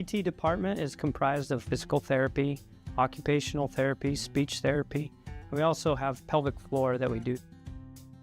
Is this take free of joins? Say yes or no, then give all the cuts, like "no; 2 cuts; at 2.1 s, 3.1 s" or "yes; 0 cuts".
no; 1 cut; at 1.3 s